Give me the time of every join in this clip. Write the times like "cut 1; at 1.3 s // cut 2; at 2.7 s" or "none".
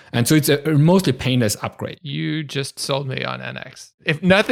none